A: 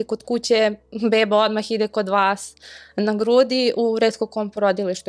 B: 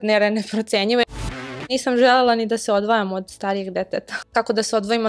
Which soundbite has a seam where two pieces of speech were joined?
B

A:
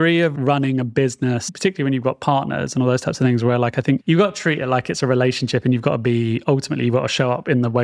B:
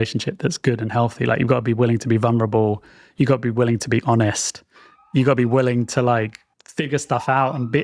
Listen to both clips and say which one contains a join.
A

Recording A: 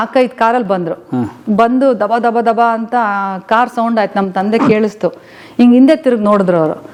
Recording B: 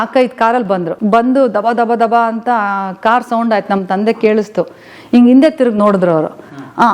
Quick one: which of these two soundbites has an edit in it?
B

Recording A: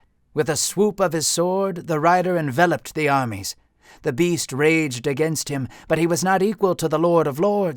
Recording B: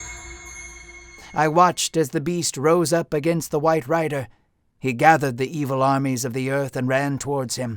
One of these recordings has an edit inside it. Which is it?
B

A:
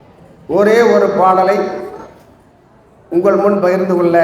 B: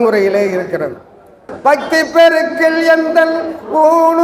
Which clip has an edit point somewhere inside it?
B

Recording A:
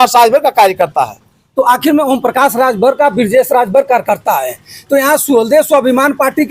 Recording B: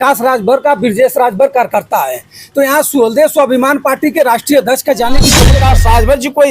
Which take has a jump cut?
B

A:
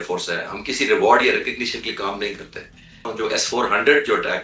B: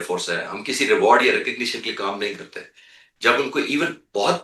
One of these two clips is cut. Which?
A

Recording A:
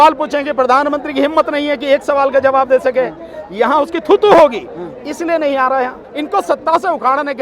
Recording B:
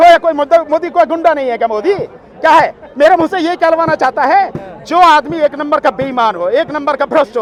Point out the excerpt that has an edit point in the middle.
A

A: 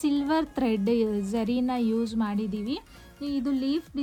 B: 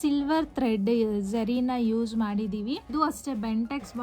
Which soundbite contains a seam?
B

